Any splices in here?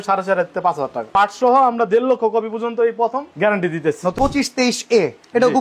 yes; 2 cuts; at 1.1 s, 4.1 s

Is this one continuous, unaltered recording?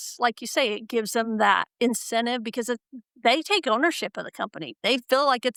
yes; 0 cuts

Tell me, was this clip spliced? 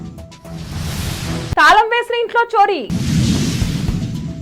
yes; 1 cut; at 1.6 s

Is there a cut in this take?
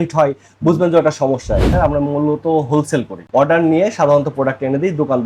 yes; 1 cut; at 1.7 s

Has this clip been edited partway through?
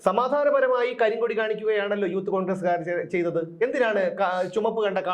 no; 0 cuts

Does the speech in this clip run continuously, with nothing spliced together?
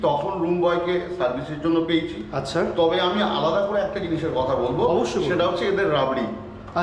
yes; 0 cuts

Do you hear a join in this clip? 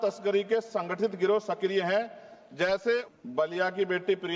yes; 1 cut; at 3.0 s

